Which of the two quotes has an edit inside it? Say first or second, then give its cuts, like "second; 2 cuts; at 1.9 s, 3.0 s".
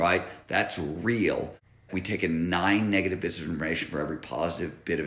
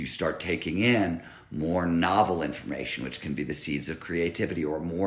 first; 1 cut; at 1.7 s